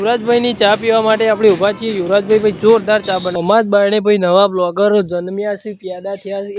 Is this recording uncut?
no; 1 cut; at 3.4 s

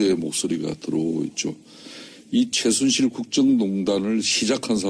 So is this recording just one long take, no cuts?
yes; 0 cuts

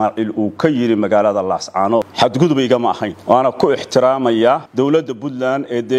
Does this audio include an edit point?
yes; 3 cuts; at 2.1 s, 3.1 s, 4.7 s

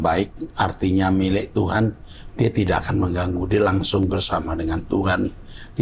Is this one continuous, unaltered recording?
yes; 0 cuts

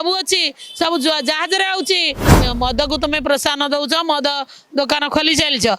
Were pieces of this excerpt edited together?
yes; 1 cut; at 2.2 s

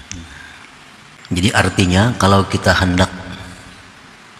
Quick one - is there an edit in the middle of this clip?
yes; 1 cut; at 1.2 s

